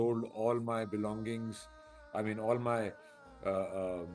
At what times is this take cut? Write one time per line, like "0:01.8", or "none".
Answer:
none

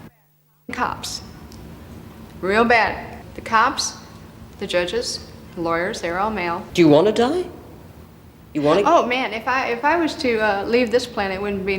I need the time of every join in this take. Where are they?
none

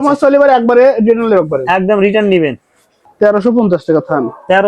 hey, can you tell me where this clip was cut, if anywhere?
0:03.0

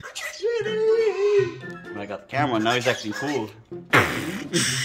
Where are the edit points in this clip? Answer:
none

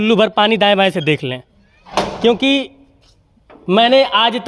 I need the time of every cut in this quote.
none

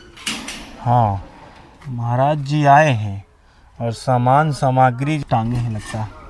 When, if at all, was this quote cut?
0:05.2

